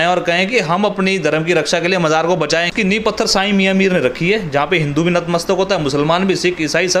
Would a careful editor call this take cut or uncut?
cut